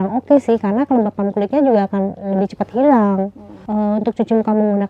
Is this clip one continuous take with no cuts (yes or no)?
no